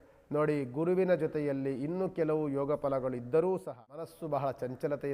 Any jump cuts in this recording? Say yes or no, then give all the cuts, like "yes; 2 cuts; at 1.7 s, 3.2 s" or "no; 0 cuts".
yes; 1 cut; at 4.2 s